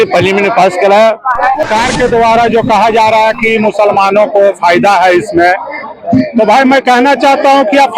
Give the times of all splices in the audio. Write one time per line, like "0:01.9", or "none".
0:01.6